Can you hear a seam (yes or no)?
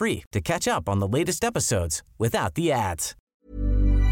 yes